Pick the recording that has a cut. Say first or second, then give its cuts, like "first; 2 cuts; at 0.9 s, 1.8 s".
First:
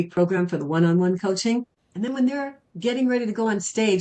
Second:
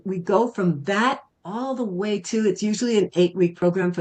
first; 1 cut; at 1.8 s